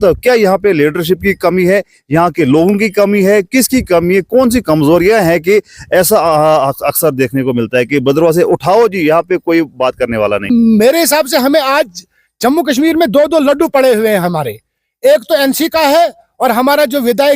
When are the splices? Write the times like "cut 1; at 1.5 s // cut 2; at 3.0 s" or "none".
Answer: cut 1; at 10.5 s